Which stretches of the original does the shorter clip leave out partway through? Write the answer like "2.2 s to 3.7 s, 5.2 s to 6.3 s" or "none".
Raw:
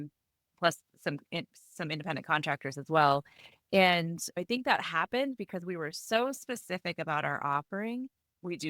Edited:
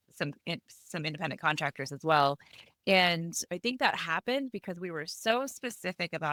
none